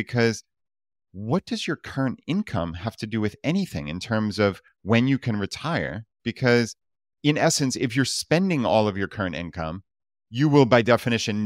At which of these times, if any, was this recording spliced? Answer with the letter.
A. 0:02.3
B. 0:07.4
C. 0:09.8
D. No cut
D